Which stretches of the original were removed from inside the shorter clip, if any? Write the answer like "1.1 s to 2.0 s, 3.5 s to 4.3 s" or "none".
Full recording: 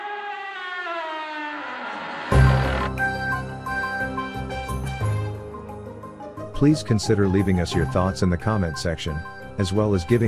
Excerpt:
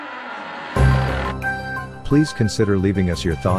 3.5 s to 6.5 s